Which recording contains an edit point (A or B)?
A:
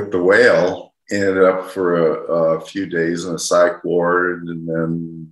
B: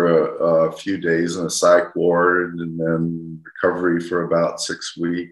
A